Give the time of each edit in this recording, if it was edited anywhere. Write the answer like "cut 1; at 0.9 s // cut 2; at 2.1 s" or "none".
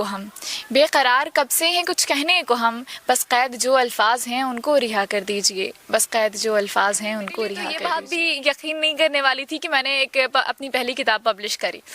cut 1; at 7.6 s